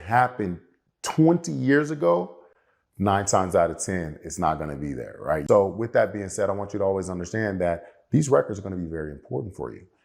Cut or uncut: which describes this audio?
cut